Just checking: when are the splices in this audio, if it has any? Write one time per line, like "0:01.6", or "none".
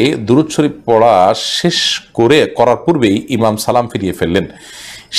none